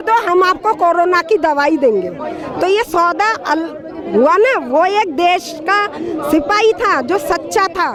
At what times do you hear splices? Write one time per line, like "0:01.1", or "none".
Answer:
none